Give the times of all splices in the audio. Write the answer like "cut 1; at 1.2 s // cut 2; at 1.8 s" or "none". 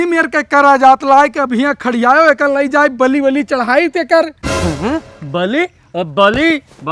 none